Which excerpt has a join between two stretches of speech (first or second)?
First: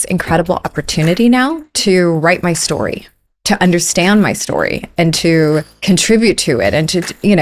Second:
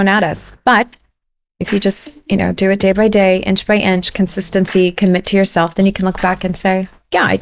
first